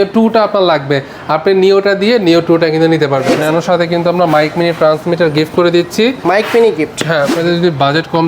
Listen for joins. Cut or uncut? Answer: cut